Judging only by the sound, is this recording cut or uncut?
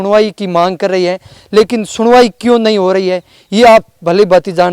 uncut